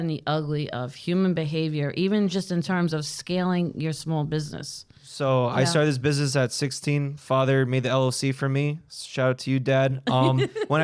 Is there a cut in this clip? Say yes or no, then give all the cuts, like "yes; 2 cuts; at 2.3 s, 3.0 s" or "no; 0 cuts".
yes; 1 cut; at 5.1 s